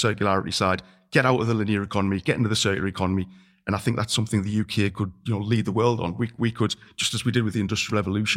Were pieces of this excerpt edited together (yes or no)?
no